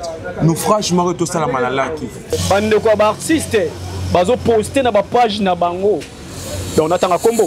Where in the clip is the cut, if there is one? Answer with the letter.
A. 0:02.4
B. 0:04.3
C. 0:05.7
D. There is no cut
A